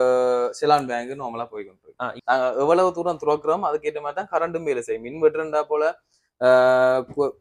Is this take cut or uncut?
cut